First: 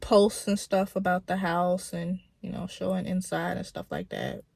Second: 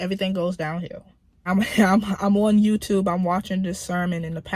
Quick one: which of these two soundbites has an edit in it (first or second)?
second